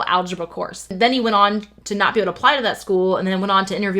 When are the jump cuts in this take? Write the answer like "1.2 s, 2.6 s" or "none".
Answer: 0.9 s